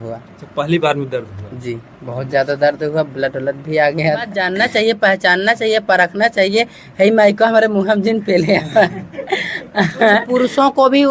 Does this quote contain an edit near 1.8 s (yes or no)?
no